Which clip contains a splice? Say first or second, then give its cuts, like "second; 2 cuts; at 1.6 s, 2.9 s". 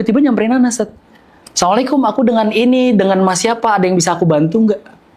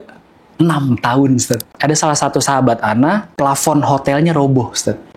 second; 2 cuts; at 1.7 s, 3.3 s